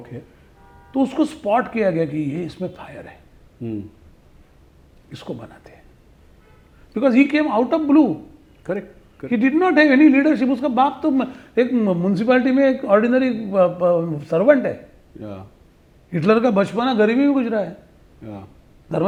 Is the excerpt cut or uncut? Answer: uncut